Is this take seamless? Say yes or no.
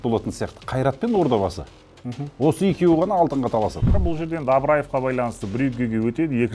no